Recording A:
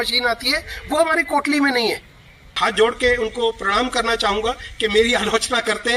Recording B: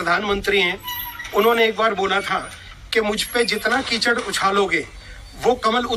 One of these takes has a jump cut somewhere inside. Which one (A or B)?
A